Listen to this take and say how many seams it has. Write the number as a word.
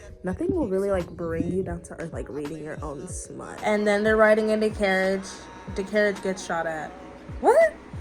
one